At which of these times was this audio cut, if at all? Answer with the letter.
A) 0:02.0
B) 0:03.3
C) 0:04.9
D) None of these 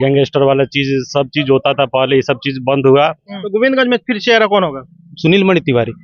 B